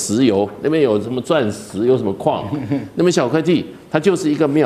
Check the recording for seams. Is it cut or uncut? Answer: uncut